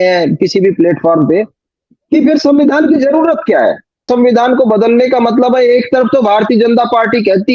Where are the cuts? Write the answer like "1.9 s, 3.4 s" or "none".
4.1 s